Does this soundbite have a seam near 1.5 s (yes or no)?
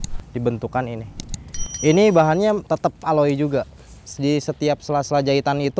no